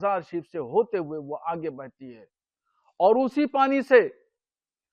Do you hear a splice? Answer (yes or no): no